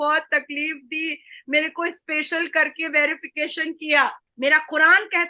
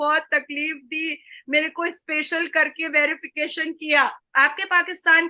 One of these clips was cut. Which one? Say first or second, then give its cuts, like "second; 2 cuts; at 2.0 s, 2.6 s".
first; 1 cut; at 4.2 s